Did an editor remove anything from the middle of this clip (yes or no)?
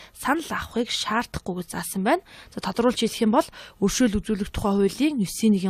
no